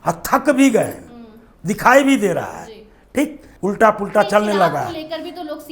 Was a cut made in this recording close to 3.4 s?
yes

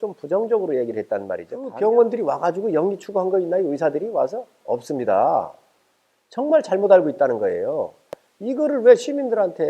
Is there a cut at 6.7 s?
no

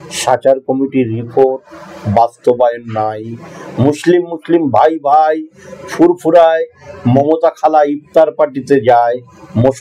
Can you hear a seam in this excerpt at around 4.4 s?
no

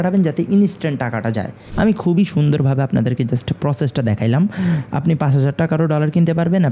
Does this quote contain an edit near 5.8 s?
no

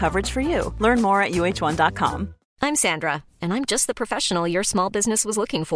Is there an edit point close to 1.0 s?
no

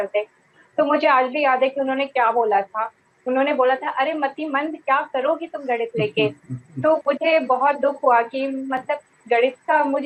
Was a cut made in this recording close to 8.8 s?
no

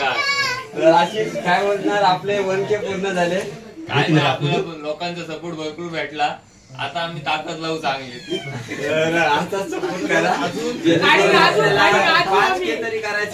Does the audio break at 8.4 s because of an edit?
no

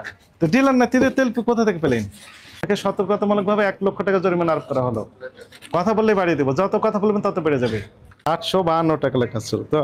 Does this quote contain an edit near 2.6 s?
yes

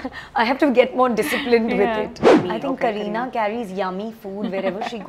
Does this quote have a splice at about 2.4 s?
yes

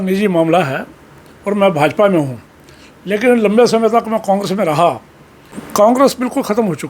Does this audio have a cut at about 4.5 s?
no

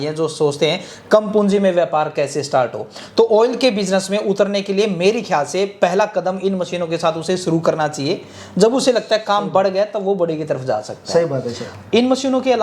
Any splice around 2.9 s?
no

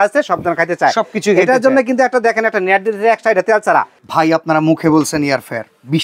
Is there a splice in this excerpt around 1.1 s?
no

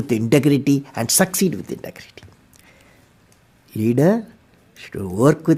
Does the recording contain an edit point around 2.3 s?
no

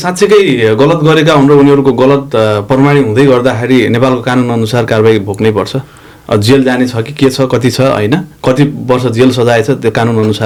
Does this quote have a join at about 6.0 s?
no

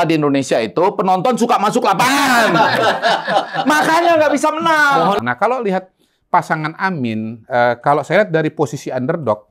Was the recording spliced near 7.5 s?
no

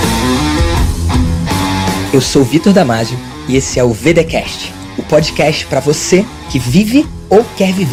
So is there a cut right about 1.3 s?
no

